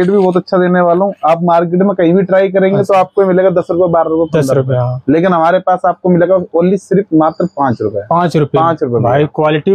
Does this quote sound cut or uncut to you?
uncut